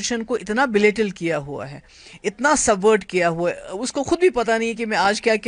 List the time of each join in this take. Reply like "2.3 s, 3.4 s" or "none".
none